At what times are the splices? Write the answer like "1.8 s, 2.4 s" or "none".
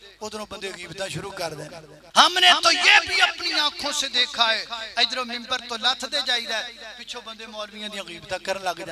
1.9 s